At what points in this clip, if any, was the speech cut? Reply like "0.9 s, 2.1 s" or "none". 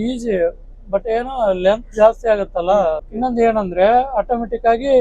3.1 s